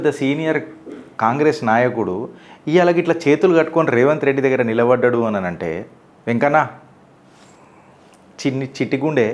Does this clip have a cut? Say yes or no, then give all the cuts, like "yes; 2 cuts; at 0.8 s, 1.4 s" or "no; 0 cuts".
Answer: no; 0 cuts